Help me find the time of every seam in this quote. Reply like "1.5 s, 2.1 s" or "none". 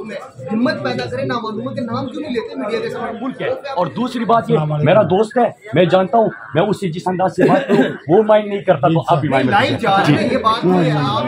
3.6 s